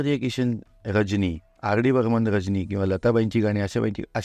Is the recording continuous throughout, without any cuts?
no; 1 cut; at 1.5 s

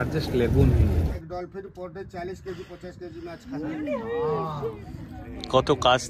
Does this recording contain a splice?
yes; 1 cut; at 1.1 s

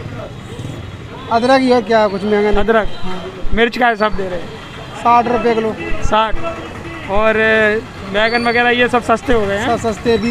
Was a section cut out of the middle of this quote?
no; 0 cuts

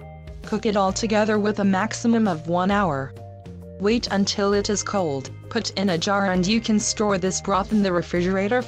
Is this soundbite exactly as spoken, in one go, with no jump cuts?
no; 1 cut; at 7.6 s

